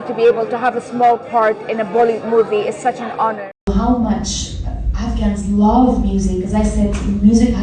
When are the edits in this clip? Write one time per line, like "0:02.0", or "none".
0:03.5